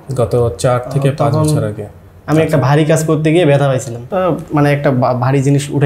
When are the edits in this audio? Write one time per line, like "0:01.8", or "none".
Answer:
0:04.0